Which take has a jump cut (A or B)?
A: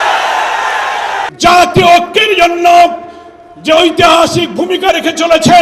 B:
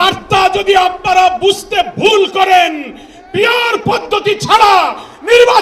A